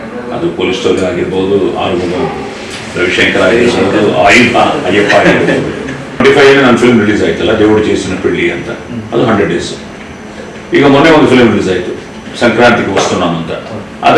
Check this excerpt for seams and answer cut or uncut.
cut